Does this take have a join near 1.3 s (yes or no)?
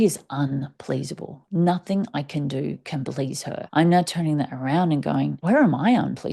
no